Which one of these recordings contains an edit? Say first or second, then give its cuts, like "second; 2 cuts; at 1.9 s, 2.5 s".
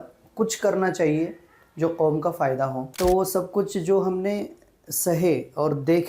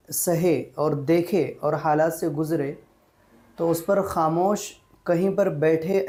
first; 1 cut; at 2.8 s